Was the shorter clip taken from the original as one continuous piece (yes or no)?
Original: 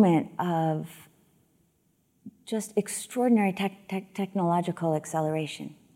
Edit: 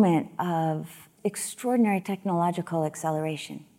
no